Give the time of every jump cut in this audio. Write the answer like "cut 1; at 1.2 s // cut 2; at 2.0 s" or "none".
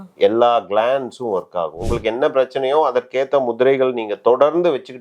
cut 1; at 1.9 s